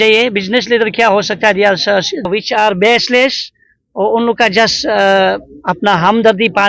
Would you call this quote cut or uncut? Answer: cut